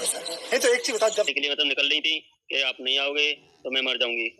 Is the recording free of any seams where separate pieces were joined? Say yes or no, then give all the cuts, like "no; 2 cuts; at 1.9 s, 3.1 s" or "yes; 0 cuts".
no; 1 cut; at 1.3 s